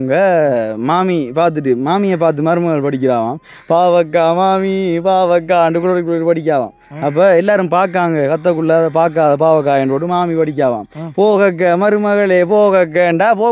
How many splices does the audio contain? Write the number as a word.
zero